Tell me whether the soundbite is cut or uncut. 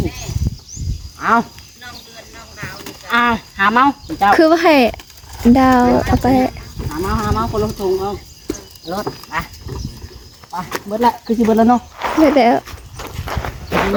uncut